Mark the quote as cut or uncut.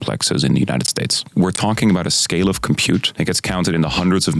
cut